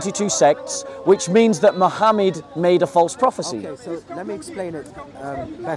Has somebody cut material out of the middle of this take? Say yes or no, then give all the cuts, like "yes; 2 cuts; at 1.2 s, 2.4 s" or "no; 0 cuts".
no; 0 cuts